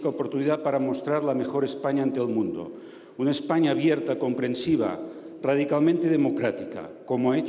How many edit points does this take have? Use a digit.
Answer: 1